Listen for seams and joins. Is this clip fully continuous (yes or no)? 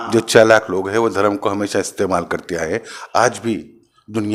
yes